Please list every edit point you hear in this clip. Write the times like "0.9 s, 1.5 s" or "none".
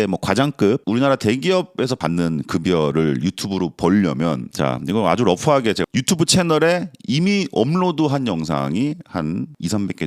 2.0 s